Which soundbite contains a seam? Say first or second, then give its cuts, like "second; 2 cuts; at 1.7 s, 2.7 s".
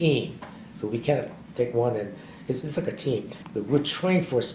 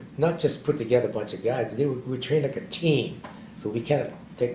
first; 1 cut; at 3.4 s